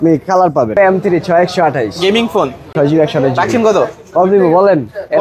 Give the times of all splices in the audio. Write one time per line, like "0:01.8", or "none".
0:00.8
0:02.7